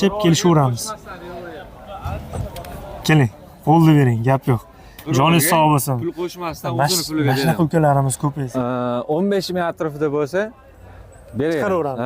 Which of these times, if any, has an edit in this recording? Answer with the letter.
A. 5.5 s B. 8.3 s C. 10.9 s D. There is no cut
B